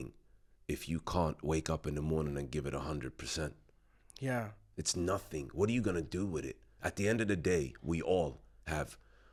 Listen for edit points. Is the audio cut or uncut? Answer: uncut